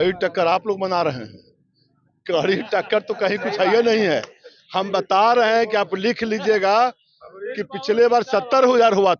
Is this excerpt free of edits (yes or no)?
yes